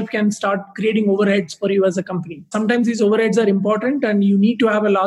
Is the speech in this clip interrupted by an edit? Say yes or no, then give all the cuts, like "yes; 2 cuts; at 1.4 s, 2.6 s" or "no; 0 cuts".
yes; 1 cut; at 2.5 s